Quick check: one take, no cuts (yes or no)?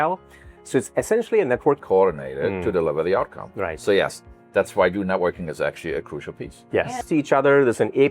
no